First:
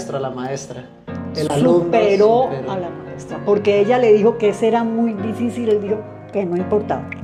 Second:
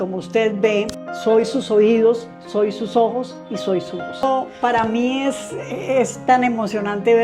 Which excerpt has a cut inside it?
second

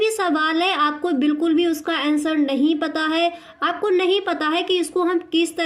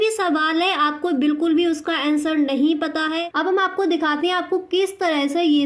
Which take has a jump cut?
second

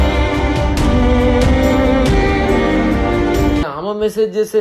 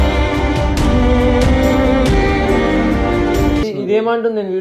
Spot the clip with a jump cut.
second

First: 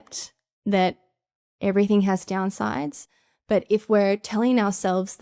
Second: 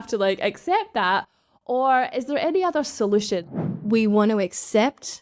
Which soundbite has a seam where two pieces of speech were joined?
second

